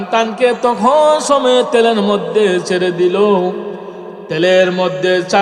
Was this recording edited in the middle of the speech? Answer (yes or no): no